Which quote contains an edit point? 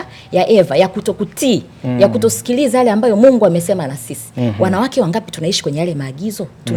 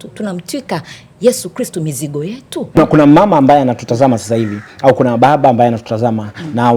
second; 1 cut; at 2.8 s

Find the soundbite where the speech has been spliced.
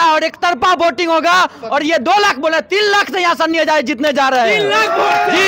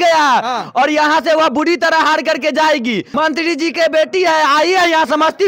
second; 1 cut; at 3.1 s

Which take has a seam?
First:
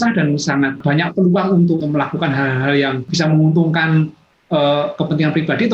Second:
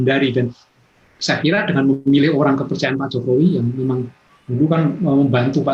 first; 3 cuts; at 0.8 s, 1.8 s, 3.1 s

